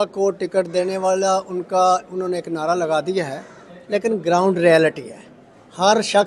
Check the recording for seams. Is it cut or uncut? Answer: uncut